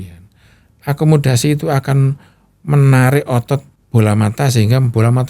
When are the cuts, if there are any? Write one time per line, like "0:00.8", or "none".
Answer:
0:03.8